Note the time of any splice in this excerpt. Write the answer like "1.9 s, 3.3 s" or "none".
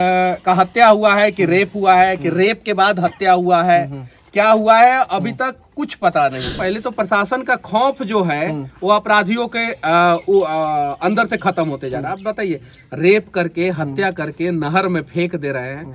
6.5 s